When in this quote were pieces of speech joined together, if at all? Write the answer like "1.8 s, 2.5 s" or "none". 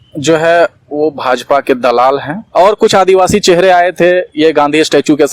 2.4 s